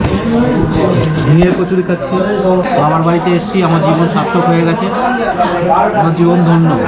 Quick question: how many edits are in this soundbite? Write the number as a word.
two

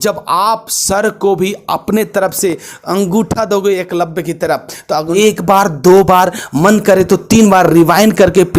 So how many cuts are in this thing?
one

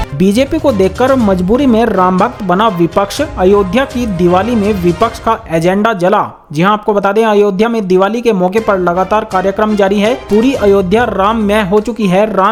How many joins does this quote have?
zero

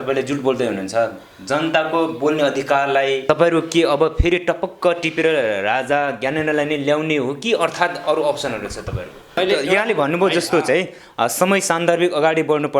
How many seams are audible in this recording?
two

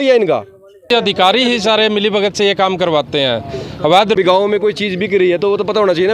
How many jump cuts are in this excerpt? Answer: two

